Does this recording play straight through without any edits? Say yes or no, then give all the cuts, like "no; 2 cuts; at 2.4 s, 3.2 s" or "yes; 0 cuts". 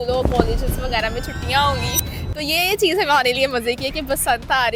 yes; 0 cuts